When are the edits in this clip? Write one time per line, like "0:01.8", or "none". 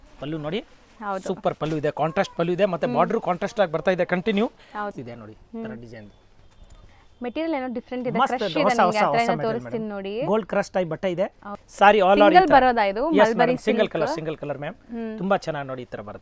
0:04.9
0:11.6